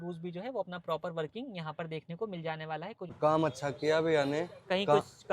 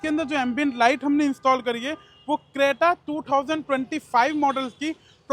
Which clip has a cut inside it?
first; 1 cut; at 3.1 s

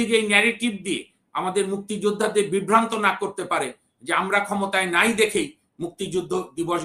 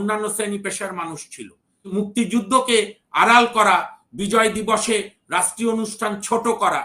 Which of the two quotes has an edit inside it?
second; 1 cut; at 1.9 s

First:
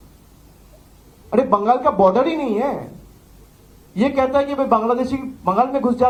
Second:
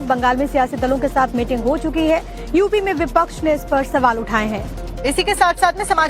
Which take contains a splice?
second; 1 cut; at 1.3 s

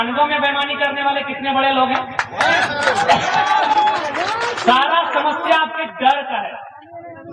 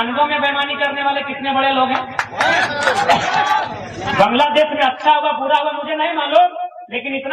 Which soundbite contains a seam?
second; 1 cut; at 3.6 s

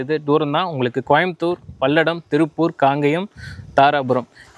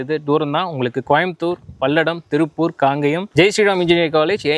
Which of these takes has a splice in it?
second; 1 cut; at 3.3 s

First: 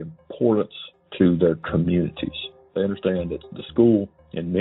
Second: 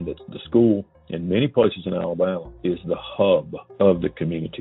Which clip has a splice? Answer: second; 2 cuts; at 2.5 s, 3.6 s

